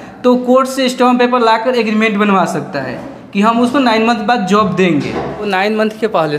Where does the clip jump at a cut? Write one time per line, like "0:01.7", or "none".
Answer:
0:05.5

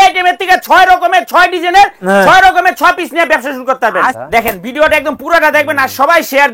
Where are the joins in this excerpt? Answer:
0:04.2

